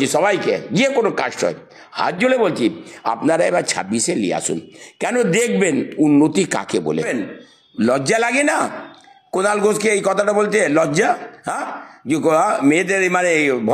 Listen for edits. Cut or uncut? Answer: cut